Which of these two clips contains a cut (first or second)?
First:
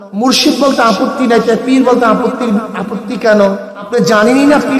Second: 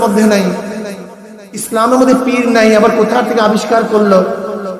first